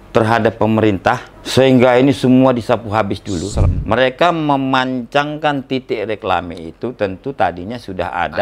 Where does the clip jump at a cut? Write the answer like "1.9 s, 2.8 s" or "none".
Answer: 1.3 s, 3.6 s